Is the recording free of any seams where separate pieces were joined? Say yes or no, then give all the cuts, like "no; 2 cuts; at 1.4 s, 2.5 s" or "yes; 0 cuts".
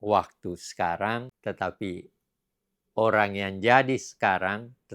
no; 1 cut; at 1.3 s